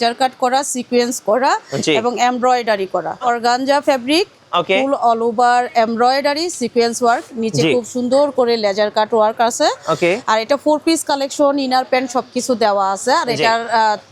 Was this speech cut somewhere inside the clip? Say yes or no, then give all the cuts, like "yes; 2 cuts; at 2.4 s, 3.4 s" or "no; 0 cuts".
yes; 1 cut; at 3.2 s